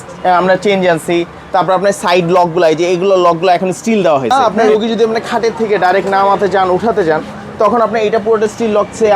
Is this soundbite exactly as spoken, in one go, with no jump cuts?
no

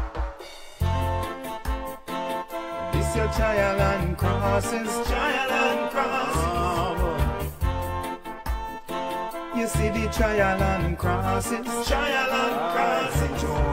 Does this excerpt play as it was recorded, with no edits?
yes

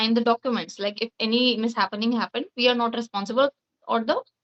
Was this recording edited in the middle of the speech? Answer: no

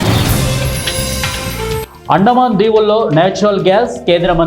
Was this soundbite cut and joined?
no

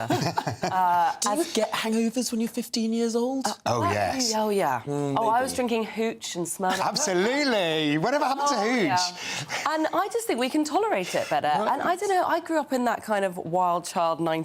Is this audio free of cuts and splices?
yes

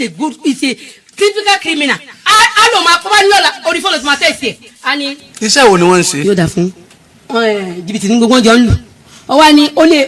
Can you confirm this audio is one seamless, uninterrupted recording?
no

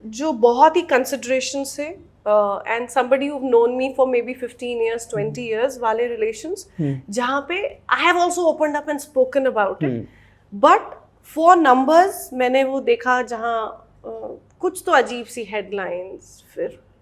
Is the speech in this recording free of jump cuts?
yes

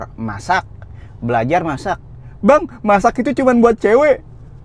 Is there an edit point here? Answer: no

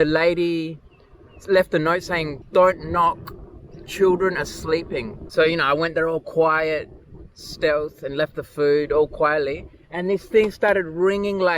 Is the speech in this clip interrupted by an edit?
yes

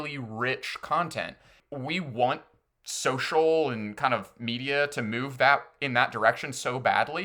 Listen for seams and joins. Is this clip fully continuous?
no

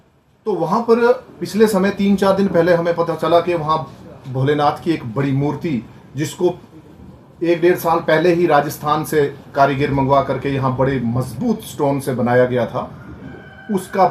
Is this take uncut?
yes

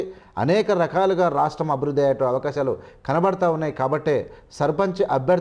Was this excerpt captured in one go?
yes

